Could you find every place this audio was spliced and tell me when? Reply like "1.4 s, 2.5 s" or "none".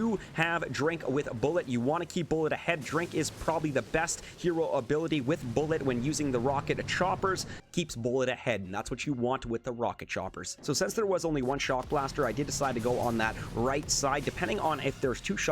7.5 s, 10.5 s